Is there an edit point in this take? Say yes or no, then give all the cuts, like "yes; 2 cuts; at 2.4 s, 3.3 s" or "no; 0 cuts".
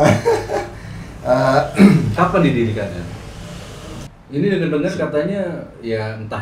yes; 1 cut; at 4.1 s